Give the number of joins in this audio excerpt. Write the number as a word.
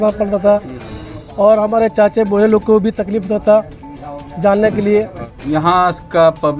one